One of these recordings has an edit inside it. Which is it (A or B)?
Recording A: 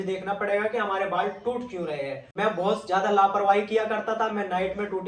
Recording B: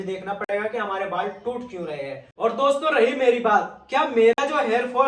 B